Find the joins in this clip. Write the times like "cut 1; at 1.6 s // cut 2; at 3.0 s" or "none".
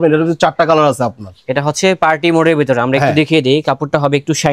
none